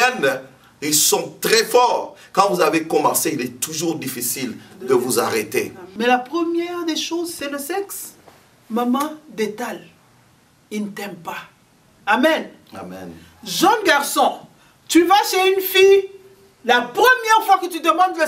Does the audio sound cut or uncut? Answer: cut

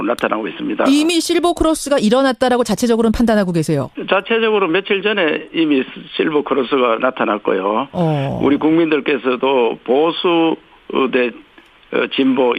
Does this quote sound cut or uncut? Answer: uncut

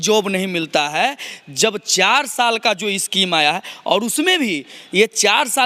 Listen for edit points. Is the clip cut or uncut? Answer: uncut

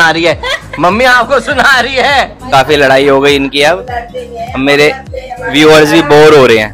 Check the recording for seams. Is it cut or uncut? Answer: cut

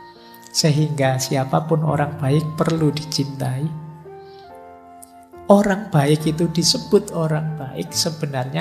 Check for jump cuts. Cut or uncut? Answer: cut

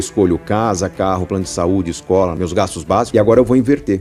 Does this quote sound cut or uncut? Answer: uncut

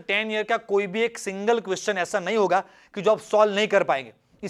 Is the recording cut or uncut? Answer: uncut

